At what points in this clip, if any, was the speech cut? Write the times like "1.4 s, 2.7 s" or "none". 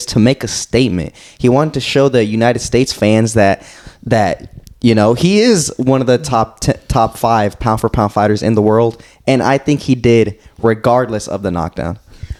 none